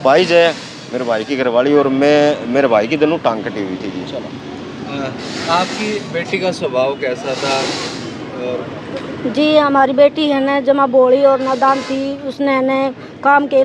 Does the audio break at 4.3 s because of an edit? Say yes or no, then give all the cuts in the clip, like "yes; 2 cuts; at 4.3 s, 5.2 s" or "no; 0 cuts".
no; 0 cuts